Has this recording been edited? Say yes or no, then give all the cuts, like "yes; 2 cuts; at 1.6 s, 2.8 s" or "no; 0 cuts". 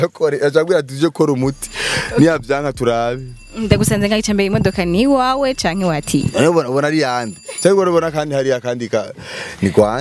no; 0 cuts